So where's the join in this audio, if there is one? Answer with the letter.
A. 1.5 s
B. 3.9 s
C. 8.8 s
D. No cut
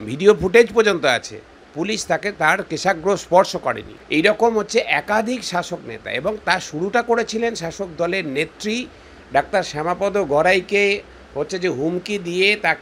B